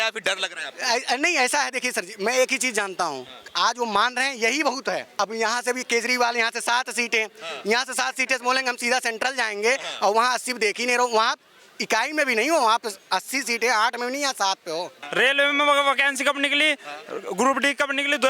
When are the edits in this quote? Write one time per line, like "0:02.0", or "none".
0:05.1
0:15.0